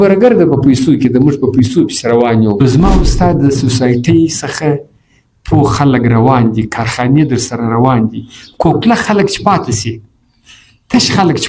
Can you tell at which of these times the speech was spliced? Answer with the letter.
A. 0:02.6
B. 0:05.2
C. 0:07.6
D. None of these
A